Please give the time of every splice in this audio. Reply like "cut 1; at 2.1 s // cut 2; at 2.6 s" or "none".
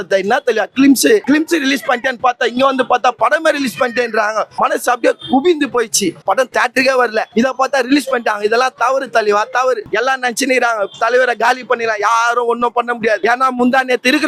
cut 1; at 1.2 s // cut 2; at 6.2 s // cut 3; at 7.3 s // cut 4; at 9.9 s // cut 5; at 13.2 s